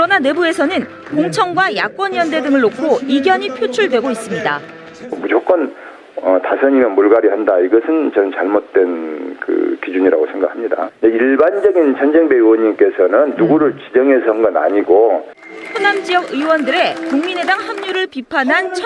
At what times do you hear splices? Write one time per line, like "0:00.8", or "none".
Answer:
0:13.2